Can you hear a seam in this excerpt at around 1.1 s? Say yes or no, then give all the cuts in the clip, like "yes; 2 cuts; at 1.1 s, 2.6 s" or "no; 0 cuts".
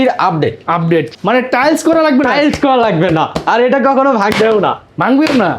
yes; 1 cut; at 1.1 s